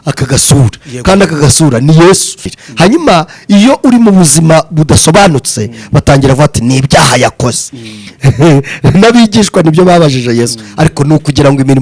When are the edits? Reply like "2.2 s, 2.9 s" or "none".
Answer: 2.6 s